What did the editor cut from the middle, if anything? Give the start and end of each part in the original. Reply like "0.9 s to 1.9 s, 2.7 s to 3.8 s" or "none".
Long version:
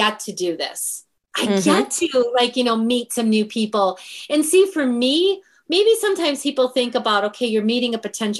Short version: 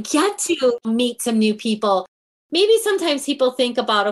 2.4 s to 2.7 s, 4.2 s to 5.5 s